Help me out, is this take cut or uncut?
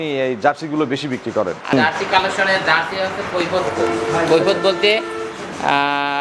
cut